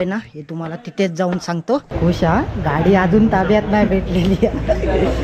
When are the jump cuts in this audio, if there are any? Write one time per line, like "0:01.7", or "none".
0:01.9